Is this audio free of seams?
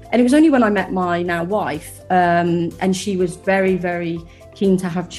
yes; 0 cuts

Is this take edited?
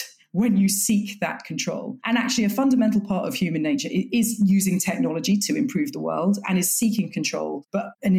no; 0 cuts

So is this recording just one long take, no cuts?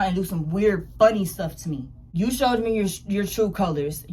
no; 1 cut; at 2.0 s

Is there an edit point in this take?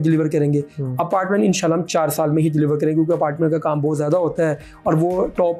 no; 0 cuts

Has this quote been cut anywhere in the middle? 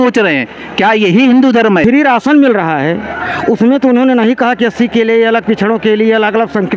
yes; 1 cut; at 1.8 s

